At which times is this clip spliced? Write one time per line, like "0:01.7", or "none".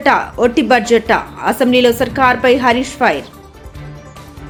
none